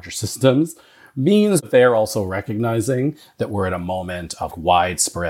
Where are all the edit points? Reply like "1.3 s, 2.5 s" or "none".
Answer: 1.6 s, 4.5 s

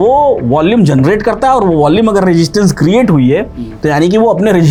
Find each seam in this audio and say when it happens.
none

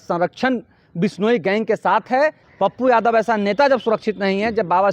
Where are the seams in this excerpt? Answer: 2.4 s

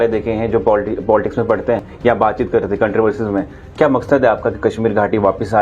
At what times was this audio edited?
1.9 s

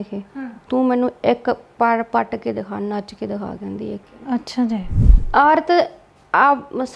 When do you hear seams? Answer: 5.0 s

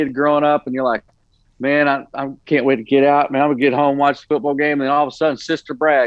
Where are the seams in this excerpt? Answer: none

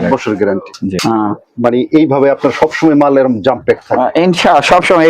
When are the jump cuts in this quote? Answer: 1.0 s

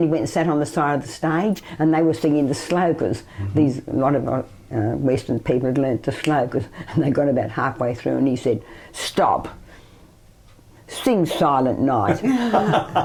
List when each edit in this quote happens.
none

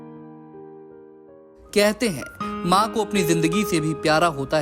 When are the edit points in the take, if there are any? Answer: 1.6 s

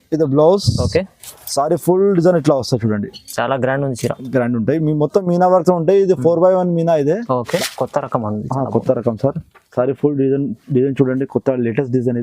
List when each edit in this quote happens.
7.6 s

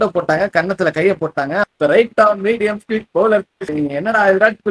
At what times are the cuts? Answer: 1.6 s, 3.6 s

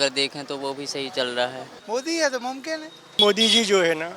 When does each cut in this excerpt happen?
1.7 s, 3.1 s

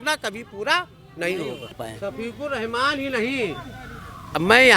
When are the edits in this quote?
1.8 s

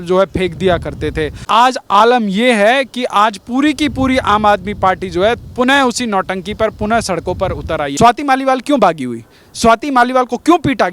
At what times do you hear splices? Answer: 1.4 s, 7.9 s

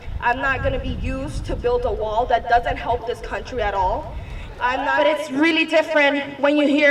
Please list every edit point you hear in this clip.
4.9 s

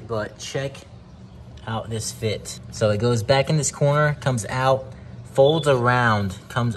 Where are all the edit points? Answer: 2.6 s

